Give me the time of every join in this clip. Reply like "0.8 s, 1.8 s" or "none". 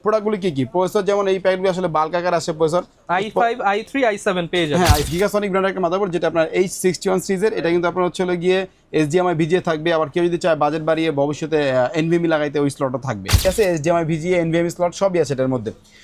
5.1 s, 13.4 s